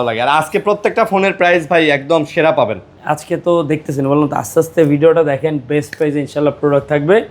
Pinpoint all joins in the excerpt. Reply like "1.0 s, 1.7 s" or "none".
none